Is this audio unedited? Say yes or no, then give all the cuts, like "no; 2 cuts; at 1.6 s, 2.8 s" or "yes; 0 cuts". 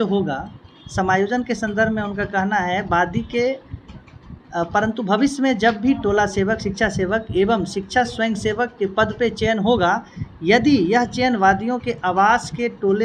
yes; 0 cuts